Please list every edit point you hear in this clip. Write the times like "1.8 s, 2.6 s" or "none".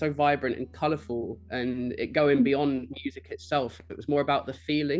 none